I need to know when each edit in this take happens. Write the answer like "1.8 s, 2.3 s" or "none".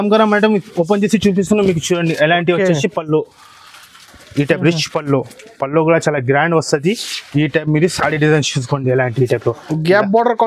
none